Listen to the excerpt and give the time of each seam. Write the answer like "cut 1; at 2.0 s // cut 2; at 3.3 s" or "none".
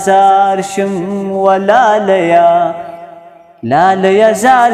none